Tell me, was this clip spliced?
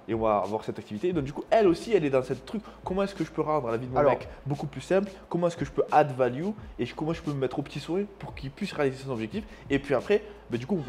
no; 0 cuts

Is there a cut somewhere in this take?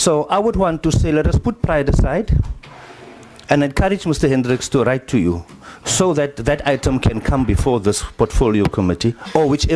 no; 0 cuts

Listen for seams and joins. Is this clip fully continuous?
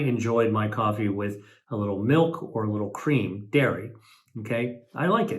yes; 0 cuts

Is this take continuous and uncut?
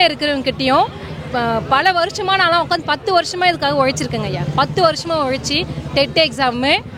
yes; 0 cuts

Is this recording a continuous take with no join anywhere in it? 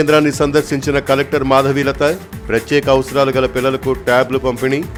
yes; 0 cuts

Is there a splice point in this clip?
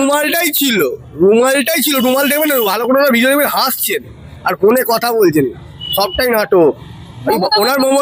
no; 0 cuts

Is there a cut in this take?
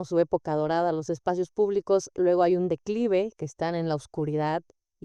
no; 0 cuts

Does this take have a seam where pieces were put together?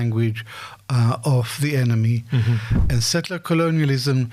yes; 1 cut; at 2.7 s

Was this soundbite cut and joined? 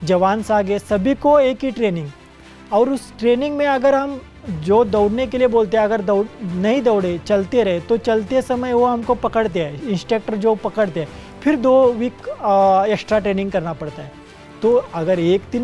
no; 0 cuts

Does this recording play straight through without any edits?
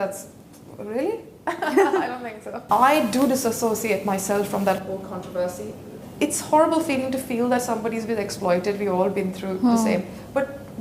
no; 1 cut; at 2.5 s

